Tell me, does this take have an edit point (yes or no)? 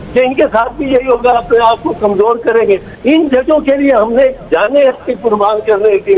yes